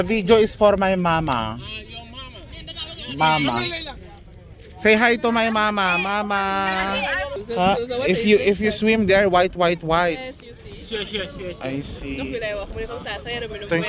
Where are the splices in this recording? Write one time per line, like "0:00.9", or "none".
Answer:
0:07.4